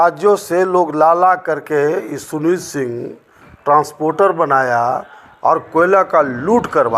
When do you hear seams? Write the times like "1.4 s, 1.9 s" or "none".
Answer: none